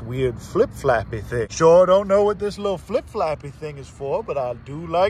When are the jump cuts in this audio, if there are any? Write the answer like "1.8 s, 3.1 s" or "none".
none